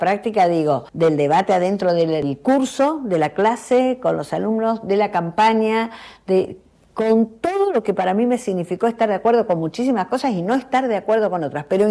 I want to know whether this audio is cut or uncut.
cut